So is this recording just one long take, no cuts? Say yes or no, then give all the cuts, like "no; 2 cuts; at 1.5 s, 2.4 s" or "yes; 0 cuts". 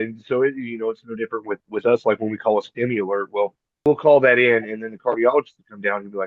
no; 1 cut; at 3.8 s